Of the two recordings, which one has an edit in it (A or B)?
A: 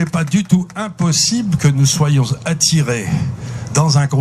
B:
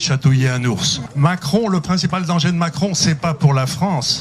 B